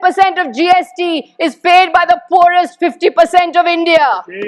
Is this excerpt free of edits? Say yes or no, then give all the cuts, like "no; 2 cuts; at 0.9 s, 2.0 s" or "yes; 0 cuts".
yes; 0 cuts